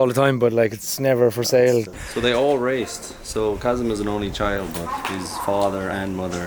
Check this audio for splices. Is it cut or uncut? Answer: cut